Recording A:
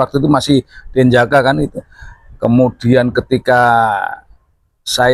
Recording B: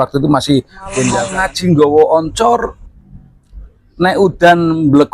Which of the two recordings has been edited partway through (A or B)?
B